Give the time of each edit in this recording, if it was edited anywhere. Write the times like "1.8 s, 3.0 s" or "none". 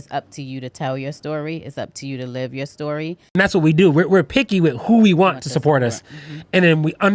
3.2 s